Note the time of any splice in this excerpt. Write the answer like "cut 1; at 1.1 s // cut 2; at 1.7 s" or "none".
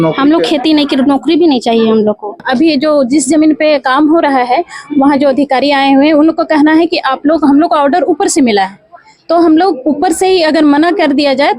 cut 1; at 2.4 s